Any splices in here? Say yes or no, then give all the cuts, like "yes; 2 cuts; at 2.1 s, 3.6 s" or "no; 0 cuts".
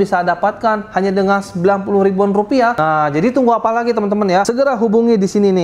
yes; 2 cuts; at 2.8 s, 4.5 s